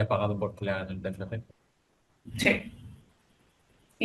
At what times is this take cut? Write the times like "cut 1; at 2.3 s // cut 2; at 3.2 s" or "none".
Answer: none